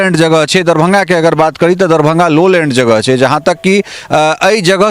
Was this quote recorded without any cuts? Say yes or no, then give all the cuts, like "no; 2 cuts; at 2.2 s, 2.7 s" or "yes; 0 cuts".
yes; 0 cuts